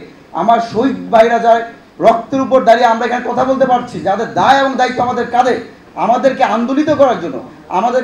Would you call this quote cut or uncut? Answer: cut